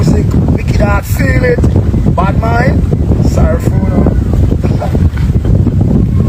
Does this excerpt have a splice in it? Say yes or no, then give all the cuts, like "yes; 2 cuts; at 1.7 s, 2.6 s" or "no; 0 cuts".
no; 0 cuts